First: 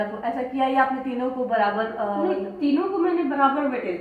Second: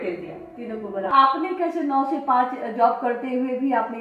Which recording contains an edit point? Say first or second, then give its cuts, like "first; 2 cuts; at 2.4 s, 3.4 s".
second; 1 cut; at 1.1 s